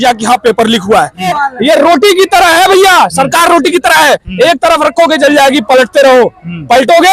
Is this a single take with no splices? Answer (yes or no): no